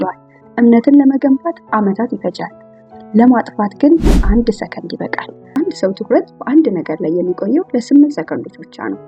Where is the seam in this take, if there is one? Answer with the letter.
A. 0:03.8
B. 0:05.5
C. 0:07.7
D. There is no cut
B